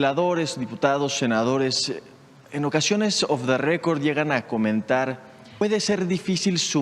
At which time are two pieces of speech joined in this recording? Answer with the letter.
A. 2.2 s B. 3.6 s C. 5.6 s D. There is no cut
C